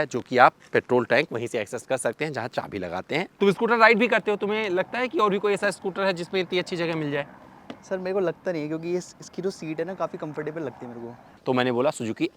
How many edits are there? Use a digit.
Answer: 2